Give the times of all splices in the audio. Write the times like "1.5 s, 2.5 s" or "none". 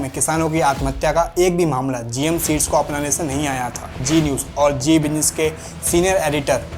4.0 s